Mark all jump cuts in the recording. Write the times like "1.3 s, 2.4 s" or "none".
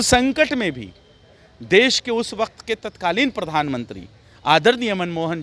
none